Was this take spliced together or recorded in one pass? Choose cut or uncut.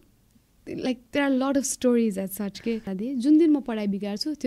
cut